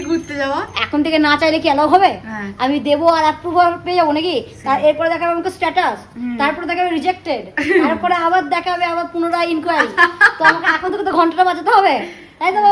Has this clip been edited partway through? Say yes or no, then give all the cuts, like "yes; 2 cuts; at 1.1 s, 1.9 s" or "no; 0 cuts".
no; 0 cuts